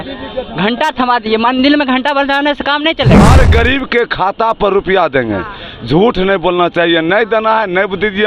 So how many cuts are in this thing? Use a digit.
1